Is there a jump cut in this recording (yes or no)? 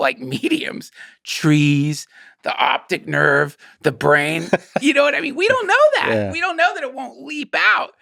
no